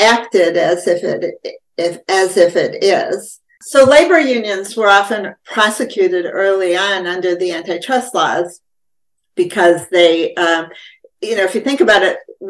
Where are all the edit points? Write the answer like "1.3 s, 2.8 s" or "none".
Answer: 3.6 s